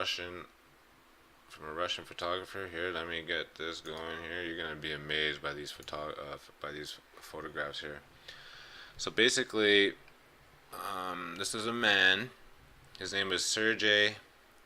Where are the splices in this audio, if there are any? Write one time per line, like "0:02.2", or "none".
0:07.7